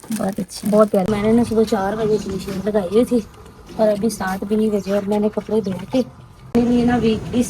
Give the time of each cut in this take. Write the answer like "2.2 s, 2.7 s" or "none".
1.1 s, 6.5 s